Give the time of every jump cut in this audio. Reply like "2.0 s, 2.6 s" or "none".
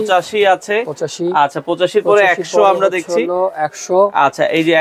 none

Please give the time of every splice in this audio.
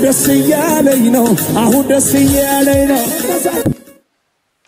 3.2 s

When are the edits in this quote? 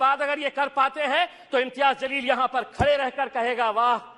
none

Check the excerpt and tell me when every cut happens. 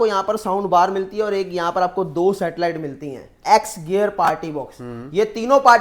3.4 s

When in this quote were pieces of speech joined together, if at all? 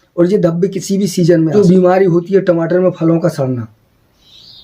1.5 s

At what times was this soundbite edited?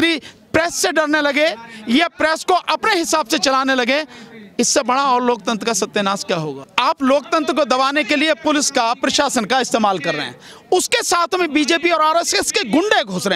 6.5 s

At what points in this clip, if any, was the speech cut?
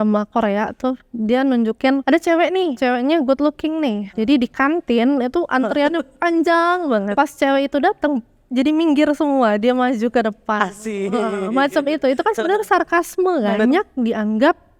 2.0 s, 2.7 s, 4.1 s, 7.1 s, 13.6 s

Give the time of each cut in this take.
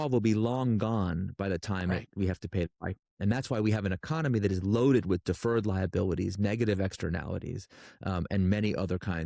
none

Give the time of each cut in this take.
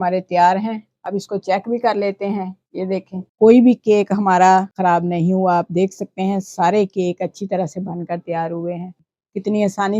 3.2 s, 4.7 s, 9.0 s

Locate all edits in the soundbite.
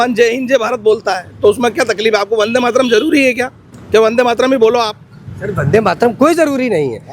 none

